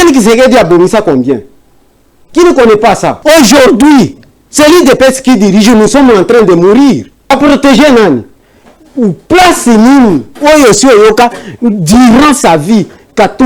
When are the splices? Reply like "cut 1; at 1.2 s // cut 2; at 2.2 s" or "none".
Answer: cut 1; at 3.2 s // cut 2; at 7.3 s